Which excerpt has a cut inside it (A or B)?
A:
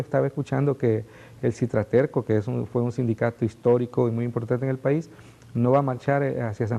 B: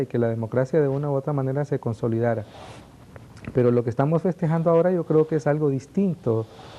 B